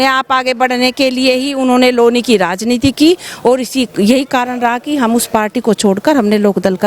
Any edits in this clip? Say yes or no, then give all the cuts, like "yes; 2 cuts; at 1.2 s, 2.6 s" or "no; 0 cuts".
no; 0 cuts